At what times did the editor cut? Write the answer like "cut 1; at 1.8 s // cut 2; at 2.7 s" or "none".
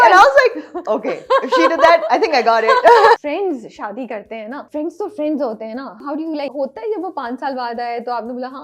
cut 1; at 3.2 s // cut 2; at 4.6 s // cut 3; at 6.0 s